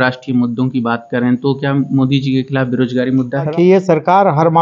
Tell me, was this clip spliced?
yes; 1 cut; at 3.5 s

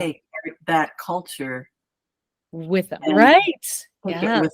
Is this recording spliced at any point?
no; 0 cuts

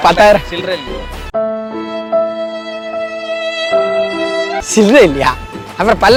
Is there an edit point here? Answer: no; 0 cuts

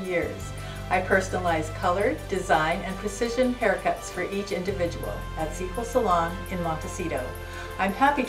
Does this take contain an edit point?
no; 0 cuts

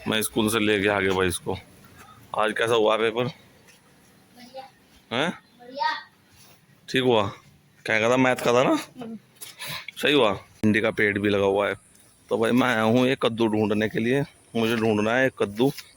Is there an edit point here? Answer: yes; 1 cut; at 10.6 s

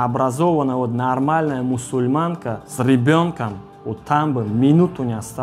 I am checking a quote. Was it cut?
yes; 1 cut; at 2.7 s

